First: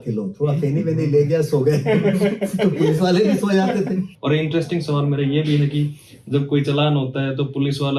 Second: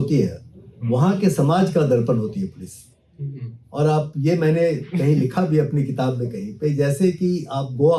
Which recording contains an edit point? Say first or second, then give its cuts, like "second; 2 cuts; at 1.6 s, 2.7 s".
first; 1 cut; at 4.1 s